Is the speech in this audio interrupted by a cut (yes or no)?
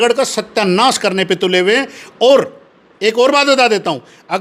no